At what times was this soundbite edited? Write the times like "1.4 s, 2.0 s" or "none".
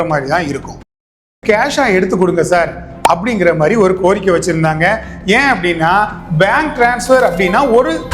1.3 s